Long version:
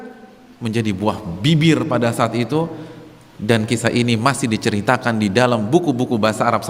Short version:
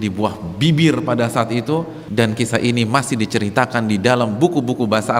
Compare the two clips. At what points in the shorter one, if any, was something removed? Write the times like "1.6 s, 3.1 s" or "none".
2.0 s